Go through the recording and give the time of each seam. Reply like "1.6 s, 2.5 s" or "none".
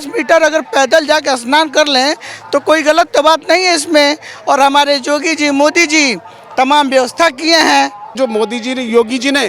8.1 s